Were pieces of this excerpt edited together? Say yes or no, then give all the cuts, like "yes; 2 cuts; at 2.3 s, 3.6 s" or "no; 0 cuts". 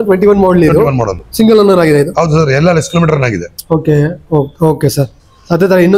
no; 0 cuts